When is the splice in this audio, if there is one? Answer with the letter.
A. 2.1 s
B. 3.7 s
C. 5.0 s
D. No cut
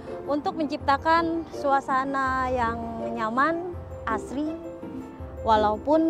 D